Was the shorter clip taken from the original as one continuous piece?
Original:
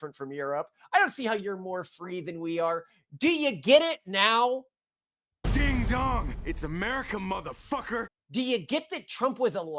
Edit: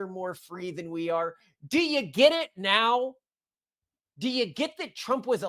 no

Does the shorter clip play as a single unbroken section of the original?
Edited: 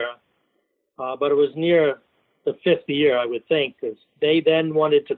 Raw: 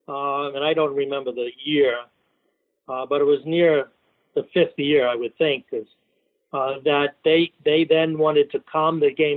no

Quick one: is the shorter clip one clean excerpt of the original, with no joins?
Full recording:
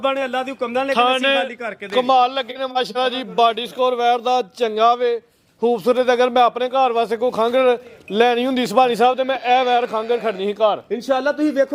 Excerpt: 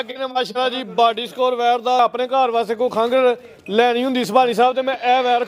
no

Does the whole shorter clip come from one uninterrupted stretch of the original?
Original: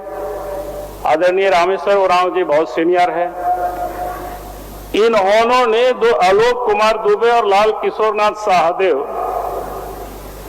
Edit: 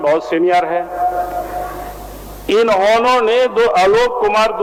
yes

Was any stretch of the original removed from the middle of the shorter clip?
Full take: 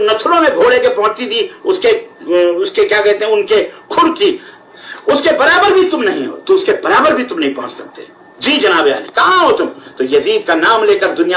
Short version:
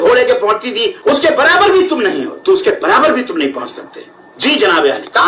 yes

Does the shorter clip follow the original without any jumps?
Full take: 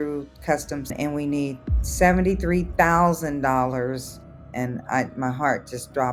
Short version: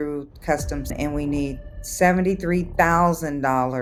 yes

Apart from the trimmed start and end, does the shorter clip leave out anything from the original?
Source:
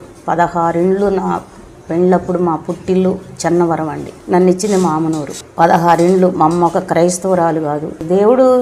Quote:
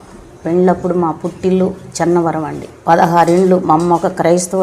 yes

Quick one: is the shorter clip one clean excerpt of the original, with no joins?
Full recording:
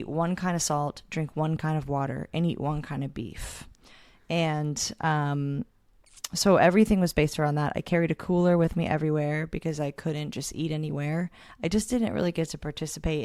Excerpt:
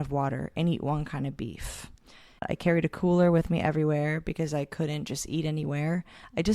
no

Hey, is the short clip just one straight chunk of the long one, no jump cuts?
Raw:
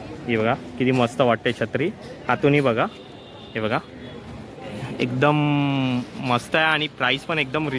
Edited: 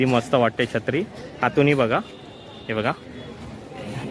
yes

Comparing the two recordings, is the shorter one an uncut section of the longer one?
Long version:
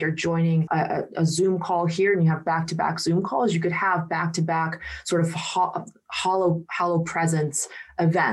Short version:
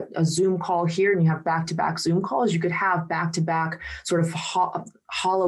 yes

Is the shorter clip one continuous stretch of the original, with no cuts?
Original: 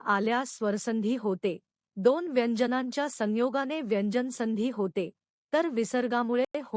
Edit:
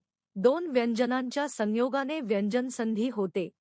yes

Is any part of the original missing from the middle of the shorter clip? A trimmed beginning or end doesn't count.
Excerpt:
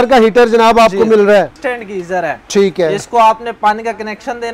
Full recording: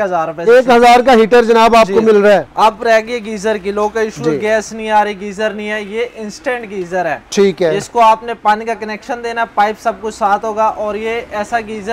yes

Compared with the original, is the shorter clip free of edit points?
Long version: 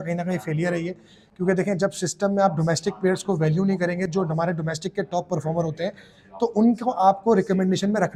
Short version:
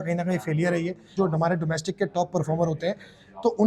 no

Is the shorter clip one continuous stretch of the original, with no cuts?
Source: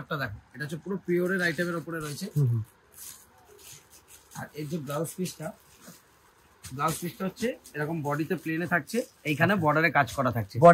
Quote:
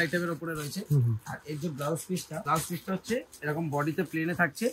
no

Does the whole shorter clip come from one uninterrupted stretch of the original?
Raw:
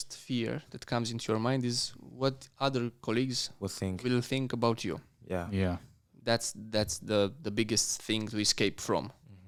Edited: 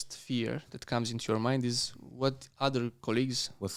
yes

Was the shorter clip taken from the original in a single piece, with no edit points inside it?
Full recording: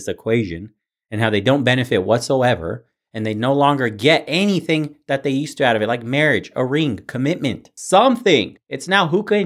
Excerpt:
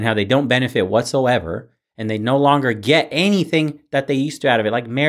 yes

